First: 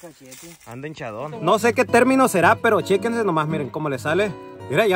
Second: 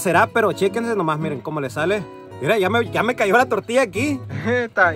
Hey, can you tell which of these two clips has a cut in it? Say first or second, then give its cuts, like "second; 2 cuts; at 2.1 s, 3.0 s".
first; 1 cut; at 1.4 s